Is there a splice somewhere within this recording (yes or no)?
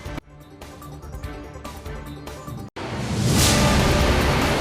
yes